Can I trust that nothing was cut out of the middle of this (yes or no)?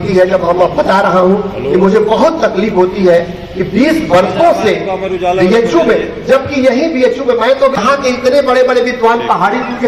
yes